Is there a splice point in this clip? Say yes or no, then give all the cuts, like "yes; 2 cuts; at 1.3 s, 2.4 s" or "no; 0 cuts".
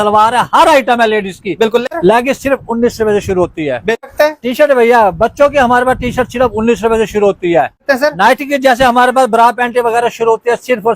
yes; 3 cuts; at 1.9 s, 4.0 s, 7.8 s